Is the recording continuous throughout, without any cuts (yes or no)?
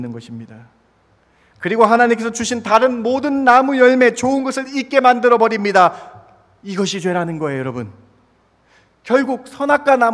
yes